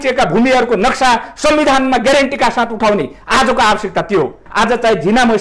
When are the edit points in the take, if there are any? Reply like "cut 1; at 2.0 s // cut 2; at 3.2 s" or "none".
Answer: cut 1; at 4.4 s